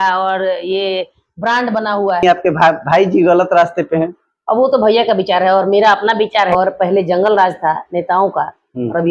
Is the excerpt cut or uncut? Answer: cut